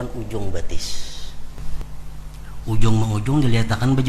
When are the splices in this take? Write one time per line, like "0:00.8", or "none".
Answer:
0:01.6

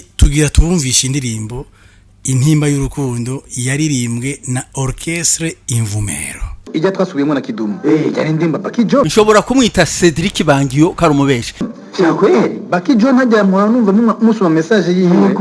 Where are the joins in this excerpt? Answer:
0:06.6
0:09.1
0:11.7

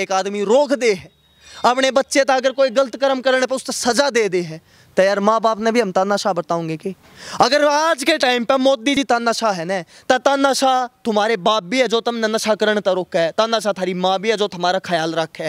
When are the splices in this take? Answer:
none

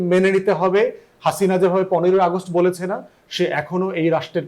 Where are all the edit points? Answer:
none

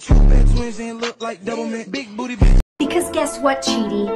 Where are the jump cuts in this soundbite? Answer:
0:02.7

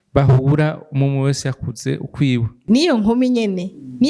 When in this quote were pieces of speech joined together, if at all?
0:02.5

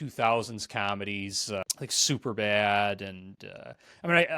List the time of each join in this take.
0:01.6

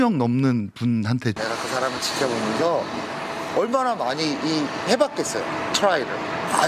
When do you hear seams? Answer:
0:01.4

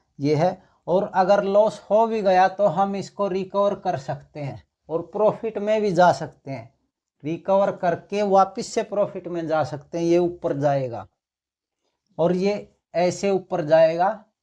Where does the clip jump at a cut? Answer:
none

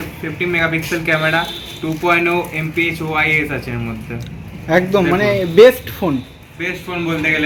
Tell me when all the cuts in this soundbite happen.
none

